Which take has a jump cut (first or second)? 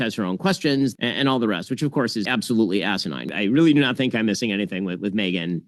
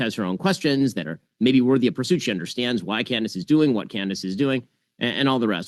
first